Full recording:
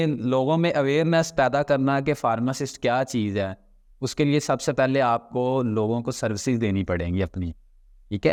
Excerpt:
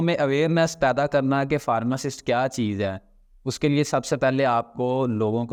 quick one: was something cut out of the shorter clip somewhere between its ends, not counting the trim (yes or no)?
no